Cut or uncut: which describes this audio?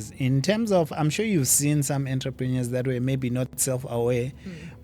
uncut